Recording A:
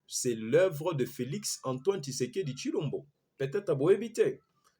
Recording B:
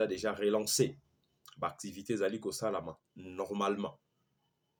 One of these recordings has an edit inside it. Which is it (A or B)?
A